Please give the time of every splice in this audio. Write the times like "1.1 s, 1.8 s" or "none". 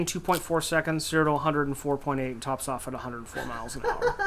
none